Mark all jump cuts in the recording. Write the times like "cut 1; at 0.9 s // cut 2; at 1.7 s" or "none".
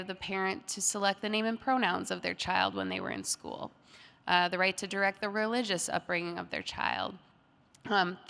none